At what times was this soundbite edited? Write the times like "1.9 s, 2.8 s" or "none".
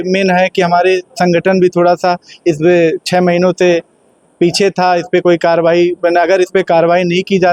none